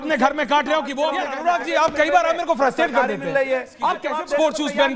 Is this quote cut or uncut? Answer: cut